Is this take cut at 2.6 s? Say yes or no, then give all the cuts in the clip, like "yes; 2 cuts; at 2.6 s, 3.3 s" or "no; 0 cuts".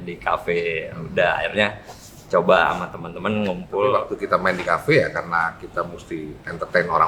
no; 1 cut; at 4.1 s